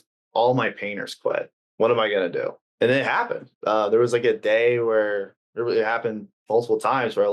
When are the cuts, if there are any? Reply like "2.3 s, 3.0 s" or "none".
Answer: 1.6 s, 2.6 s